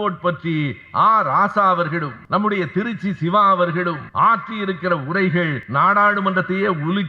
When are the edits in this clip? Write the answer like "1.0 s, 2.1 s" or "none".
2.1 s, 4.0 s, 5.6 s

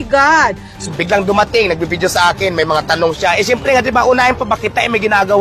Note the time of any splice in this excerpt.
0.9 s

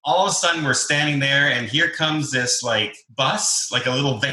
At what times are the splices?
3.0 s

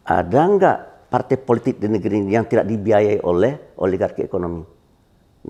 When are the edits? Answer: none

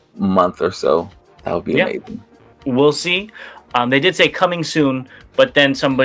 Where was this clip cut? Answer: none

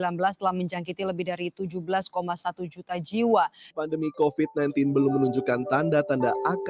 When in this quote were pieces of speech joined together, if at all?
none

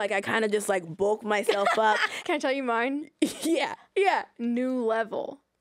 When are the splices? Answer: 2.1 s, 4.3 s

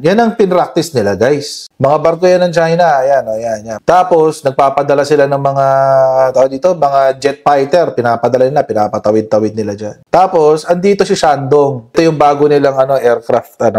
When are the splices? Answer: 1.6 s, 3.6 s, 11.9 s

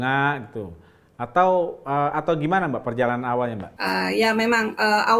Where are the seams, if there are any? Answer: none

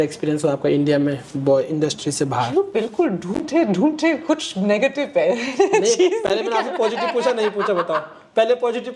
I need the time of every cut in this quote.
none

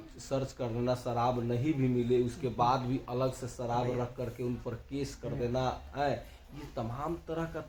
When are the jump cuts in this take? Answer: none

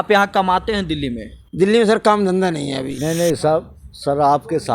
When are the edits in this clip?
2.9 s

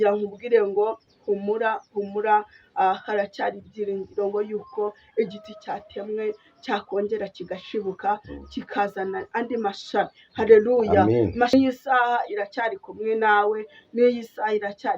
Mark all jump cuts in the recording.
11.5 s

